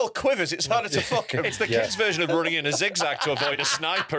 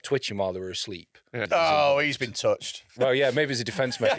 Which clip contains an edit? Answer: second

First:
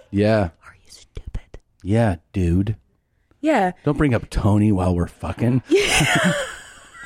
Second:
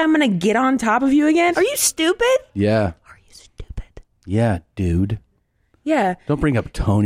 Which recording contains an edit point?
second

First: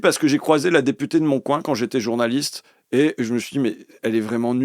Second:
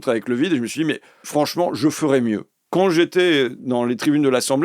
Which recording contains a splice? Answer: second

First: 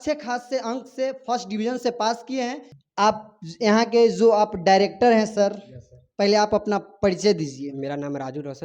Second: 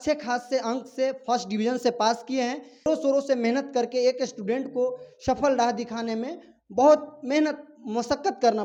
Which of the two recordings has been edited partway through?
first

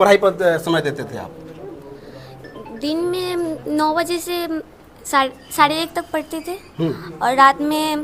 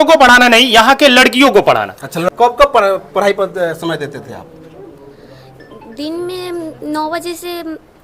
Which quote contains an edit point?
second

